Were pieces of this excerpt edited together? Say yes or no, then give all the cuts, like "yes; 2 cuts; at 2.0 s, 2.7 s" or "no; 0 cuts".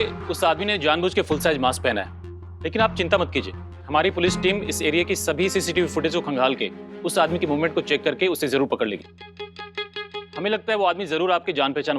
yes; 2 cuts; at 2.3 s, 9.3 s